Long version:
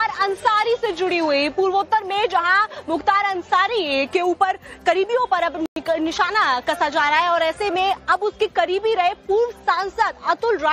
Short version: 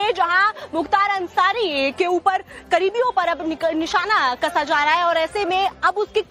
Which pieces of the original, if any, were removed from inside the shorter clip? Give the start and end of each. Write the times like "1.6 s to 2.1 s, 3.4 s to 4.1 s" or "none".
5.7 s to 5.8 s